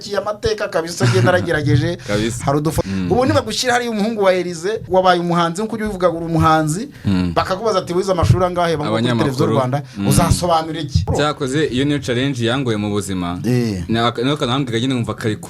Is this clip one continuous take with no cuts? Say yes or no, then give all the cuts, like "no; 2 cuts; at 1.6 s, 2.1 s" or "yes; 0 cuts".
no; 4 cuts; at 2.8 s, 4.8 s, 8.8 s, 11.0 s